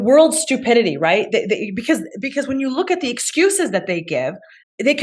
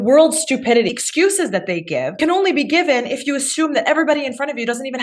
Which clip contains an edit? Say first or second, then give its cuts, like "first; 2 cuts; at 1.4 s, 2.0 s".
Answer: second; 2 cuts; at 0.9 s, 2.2 s